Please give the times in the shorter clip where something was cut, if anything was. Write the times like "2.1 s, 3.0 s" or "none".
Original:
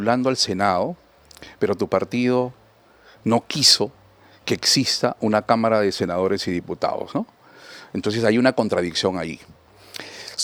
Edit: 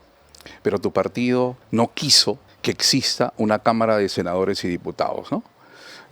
1.6 s, 2.5 s